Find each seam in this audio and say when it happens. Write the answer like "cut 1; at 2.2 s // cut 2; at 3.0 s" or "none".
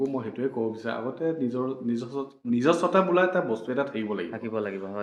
none